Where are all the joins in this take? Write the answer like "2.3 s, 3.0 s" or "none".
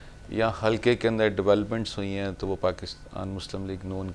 none